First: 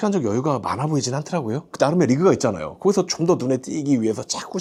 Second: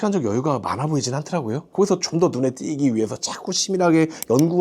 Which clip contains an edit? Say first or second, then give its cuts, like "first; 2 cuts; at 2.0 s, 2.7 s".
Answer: second; 1 cut; at 1.6 s